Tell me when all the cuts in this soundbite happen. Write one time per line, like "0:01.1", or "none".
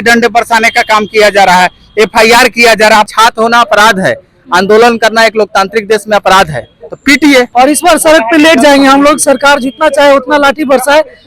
0:03.1
0:07.5